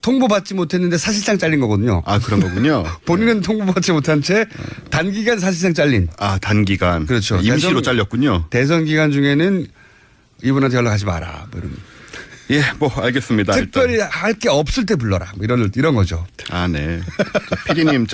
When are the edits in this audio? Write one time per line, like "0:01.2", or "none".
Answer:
0:10.5